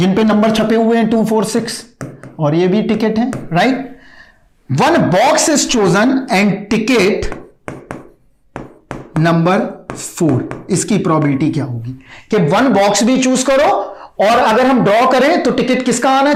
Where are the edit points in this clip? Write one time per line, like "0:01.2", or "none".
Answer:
none